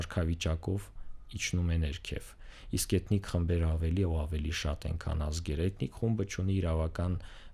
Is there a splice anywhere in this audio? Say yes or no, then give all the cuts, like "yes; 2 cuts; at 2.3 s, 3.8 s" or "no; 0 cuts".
no; 0 cuts